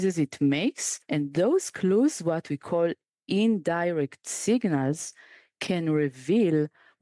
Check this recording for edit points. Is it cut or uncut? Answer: cut